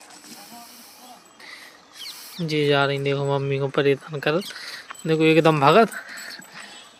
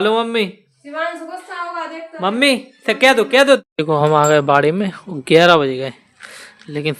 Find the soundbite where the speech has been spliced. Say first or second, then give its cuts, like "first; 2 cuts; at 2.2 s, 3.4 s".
second; 1 cut; at 3.7 s